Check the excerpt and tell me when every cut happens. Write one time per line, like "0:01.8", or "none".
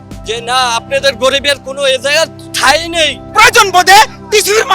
0:03.2